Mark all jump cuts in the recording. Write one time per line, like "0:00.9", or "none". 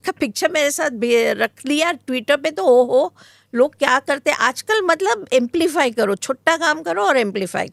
none